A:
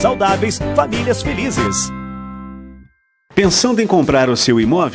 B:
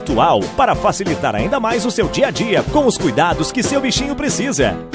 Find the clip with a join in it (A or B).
A